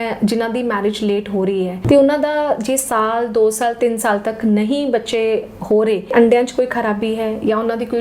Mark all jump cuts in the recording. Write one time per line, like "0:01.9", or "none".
0:01.8
0:06.1

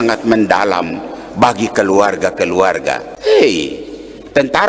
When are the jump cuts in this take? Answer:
0:03.1

